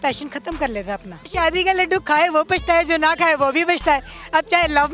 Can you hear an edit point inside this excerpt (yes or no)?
yes